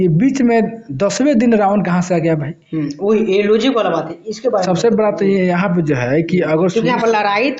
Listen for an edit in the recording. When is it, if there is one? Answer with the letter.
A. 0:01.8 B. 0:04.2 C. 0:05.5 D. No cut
D